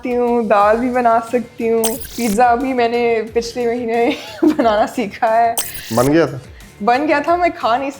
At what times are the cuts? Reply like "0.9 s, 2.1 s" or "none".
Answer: 2.1 s